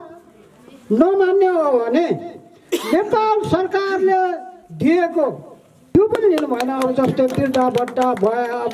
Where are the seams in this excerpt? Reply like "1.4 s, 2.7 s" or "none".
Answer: 5.9 s